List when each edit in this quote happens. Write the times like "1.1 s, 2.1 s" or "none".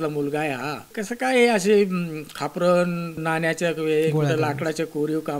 1.0 s, 3.2 s